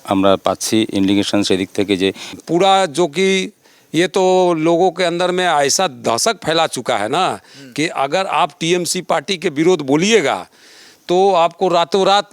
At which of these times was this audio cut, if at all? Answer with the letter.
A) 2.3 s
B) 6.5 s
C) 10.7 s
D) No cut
A